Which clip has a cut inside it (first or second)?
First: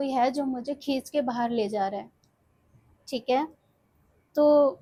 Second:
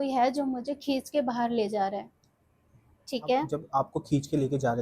second